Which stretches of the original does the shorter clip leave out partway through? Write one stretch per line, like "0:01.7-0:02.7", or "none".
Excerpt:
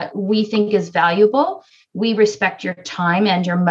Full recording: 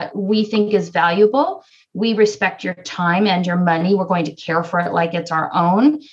none